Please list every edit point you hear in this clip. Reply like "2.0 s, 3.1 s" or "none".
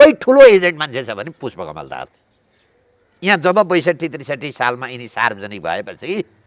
none